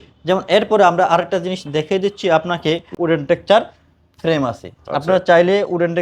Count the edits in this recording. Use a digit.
1